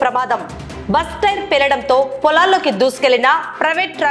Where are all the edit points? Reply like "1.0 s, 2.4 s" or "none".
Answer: none